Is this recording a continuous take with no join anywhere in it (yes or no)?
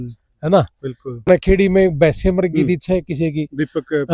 no